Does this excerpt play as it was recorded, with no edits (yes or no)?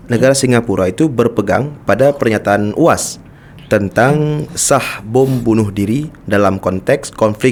yes